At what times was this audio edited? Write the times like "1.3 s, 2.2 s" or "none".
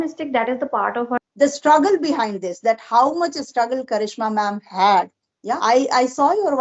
1.2 s, 5.6 s